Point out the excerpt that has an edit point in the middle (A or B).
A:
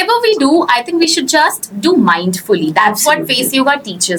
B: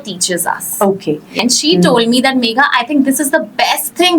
B